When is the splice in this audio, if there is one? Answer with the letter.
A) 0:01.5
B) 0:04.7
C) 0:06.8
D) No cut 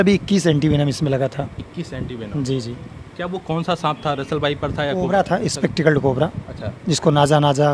D